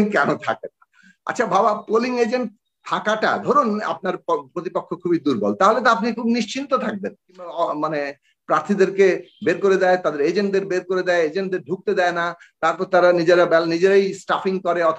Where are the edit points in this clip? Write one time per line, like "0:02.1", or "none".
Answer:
0:07.5